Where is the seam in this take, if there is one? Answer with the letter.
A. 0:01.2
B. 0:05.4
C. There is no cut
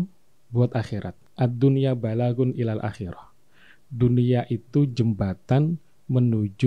A